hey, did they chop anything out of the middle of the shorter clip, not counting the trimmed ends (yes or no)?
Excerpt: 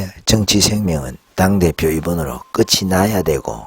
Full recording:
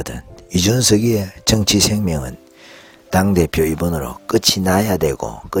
yes